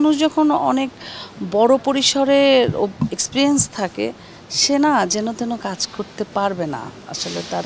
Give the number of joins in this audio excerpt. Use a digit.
0